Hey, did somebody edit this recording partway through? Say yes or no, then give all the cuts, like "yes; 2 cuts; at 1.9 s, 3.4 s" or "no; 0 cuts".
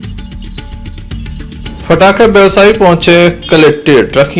yes; 1 cut; at 1.6 s